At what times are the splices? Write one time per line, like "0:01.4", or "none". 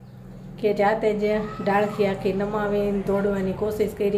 none

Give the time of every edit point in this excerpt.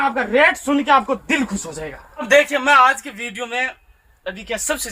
0:02.1

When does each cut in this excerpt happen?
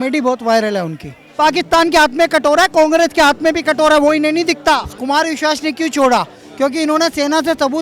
0:01.3
0:04.9

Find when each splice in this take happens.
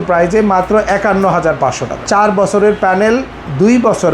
0:01.9

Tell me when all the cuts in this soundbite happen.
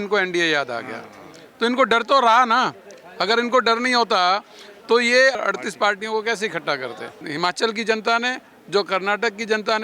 0:05.4
0:07.2

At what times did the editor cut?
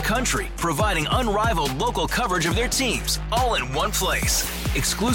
none

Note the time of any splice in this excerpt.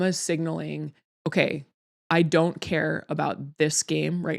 0:01.0

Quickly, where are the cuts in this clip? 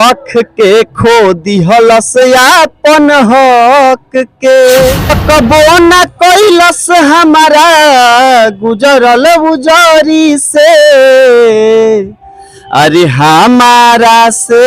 0:05.1

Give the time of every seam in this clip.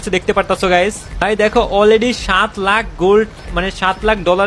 0:01.2

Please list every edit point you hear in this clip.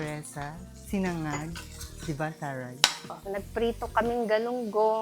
0:03.2

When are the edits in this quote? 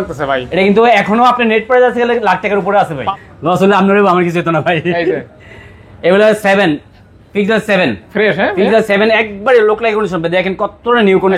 0:03.1

